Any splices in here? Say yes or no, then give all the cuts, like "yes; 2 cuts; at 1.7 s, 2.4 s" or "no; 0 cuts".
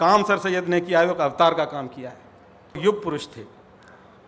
yes; 1 cut; at 2.8 s